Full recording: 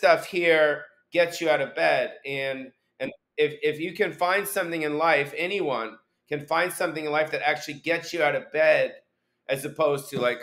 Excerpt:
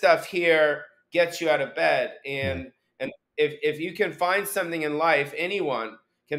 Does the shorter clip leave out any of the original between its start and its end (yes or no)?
no